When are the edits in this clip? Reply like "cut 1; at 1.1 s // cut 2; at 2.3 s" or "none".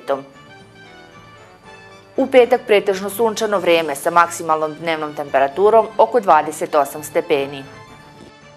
cut 1; at 7.7 s